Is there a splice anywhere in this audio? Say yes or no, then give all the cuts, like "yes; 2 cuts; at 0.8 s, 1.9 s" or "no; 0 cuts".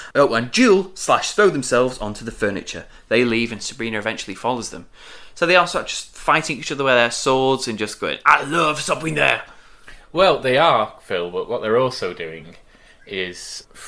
no; 0 cuts